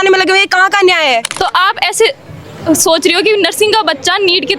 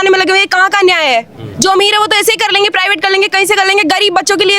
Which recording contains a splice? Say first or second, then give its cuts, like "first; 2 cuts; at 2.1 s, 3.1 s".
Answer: first; 1 cut; at 1.3 s